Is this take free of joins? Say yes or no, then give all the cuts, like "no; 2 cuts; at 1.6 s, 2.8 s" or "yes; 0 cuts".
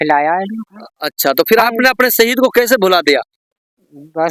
yes; 0 cuts